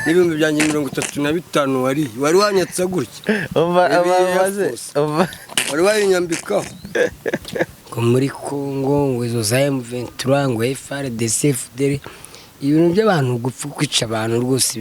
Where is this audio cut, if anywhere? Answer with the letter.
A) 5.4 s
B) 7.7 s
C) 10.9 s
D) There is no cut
B